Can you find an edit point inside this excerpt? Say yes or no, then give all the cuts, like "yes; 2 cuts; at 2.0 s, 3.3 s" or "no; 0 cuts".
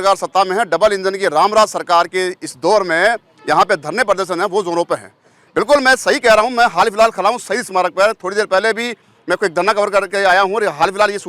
no; 0 cuts